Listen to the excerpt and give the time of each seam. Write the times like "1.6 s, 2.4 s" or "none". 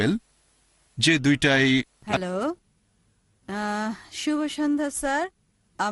2.0 s